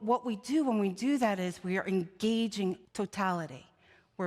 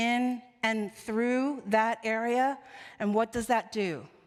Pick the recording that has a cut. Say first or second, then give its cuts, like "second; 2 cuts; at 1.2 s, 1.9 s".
first; 1 cut; at 2.9 s